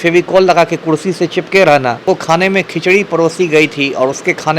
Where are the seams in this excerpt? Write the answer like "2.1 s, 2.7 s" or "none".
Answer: 2.1 s